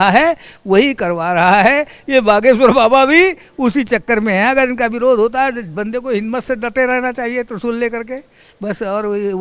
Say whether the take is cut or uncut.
uncut